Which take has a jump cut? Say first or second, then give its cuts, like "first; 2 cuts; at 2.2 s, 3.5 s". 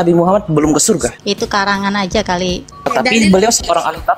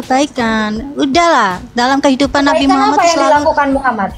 first; 2 cuts; at 1.2 s, 2.7 s